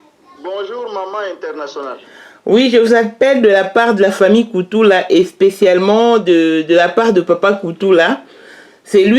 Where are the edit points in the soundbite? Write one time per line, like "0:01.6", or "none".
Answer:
none